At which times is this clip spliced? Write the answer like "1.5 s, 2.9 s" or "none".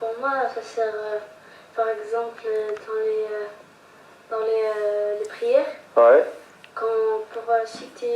1.0 s

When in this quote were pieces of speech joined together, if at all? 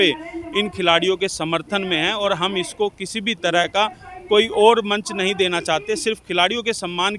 none

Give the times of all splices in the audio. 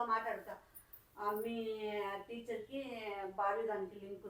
none

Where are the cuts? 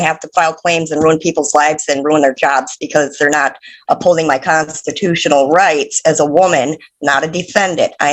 none

